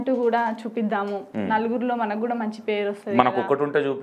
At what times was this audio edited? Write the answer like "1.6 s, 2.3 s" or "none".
1.3 s